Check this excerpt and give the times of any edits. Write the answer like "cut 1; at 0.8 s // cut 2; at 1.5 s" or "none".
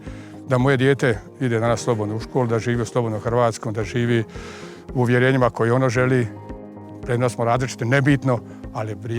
none